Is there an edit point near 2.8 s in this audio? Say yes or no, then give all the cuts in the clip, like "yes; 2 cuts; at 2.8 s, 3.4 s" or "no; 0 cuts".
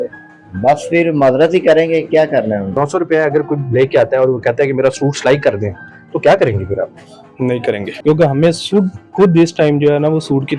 yes; 2 cuts; at 2.8 s, 7.9 s